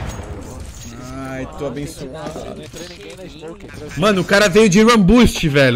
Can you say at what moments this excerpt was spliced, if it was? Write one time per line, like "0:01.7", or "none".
0:03.7